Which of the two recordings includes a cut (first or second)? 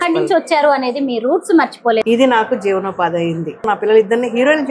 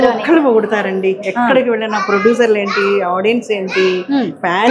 first